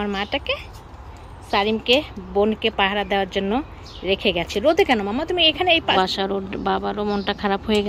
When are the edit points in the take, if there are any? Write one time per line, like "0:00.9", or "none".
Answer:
0:05.9

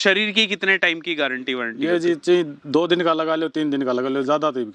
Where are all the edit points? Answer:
none

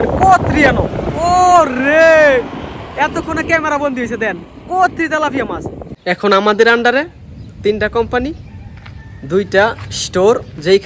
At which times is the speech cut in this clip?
0:05.9

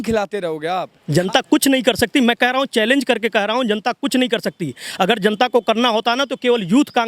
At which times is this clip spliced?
0:00.9

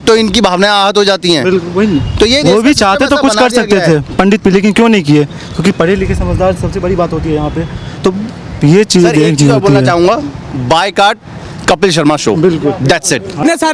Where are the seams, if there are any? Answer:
none

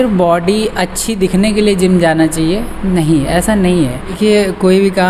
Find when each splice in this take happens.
0:04.2

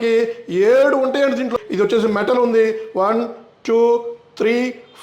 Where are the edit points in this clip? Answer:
0:01.5

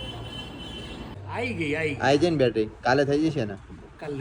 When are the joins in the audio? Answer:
0:01.2

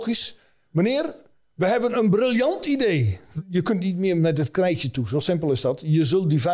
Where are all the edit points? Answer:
0:03.2

